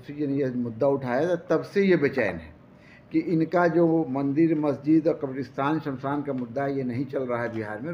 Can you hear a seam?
no; 0 cuts

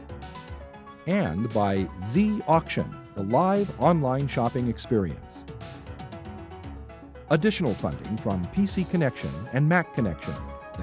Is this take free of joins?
no; 1 cut; at 1.0 s

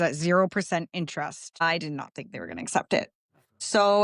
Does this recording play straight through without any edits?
no; 1 cut; at 1.5 s

